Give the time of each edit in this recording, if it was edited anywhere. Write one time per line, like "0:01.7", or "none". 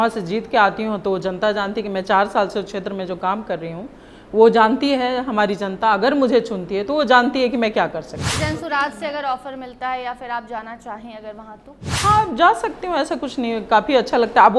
0:08.4